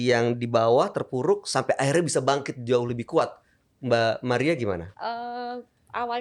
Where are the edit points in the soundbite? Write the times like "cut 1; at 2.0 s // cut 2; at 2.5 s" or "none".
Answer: cut 1; at 4.9 s